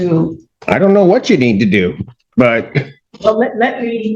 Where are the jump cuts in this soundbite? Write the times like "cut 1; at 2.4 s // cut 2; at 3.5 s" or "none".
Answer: cut 1; at 3.0 s